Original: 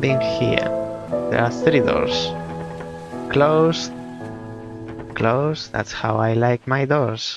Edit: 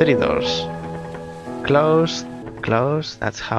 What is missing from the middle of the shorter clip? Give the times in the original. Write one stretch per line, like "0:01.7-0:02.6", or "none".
0:04.1-0:05.0